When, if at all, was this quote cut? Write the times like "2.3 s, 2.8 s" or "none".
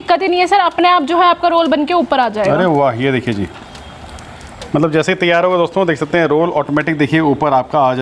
none